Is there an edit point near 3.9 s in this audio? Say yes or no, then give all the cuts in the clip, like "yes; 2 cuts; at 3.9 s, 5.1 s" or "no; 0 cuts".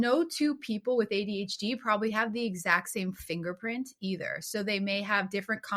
no; 0 cuts